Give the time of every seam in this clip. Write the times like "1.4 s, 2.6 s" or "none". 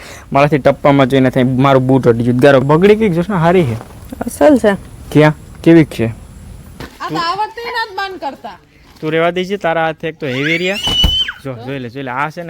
2.6 s, 6.9 s